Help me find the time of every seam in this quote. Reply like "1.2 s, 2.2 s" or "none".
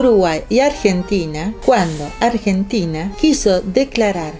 1.5 s, 3.1 s